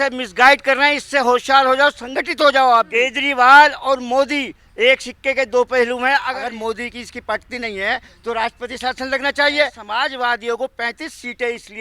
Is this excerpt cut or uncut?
cut